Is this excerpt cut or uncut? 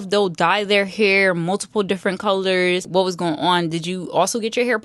cut